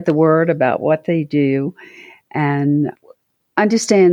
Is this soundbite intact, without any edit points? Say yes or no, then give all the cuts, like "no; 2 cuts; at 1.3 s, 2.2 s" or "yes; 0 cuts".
no; 1 cut; at 3.0 s